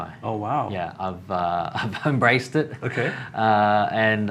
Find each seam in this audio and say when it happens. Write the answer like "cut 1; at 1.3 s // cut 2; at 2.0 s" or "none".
none